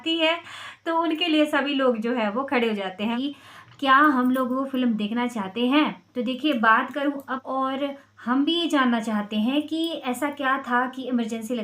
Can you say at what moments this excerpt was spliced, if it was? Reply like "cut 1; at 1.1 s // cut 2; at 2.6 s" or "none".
cut 1; at 2.9 s // cut 2; at 7.3 s